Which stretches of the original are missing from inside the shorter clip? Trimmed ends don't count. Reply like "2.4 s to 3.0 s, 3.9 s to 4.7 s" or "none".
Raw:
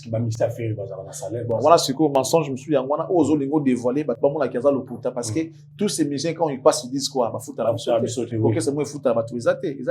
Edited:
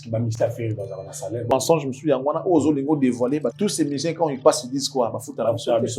1.5 s to 2.1 s, 4.1 s to 5.7 s